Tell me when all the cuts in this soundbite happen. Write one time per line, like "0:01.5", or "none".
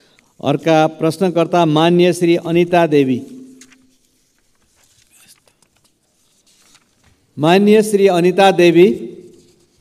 none